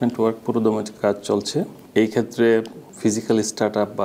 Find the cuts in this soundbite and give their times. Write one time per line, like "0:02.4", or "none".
0:00.9
0:01.8
0:02.8